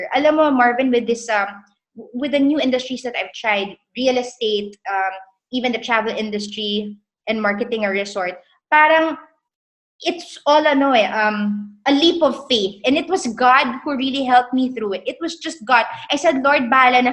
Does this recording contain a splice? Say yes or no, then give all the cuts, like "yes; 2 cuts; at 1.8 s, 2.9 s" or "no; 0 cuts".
no; 0 cuts